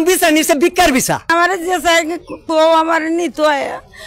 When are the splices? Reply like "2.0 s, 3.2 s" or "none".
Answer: 1.3 s